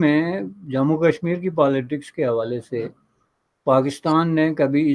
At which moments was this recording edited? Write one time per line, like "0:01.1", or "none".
none